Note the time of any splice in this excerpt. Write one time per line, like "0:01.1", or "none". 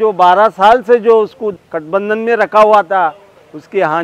0:01.7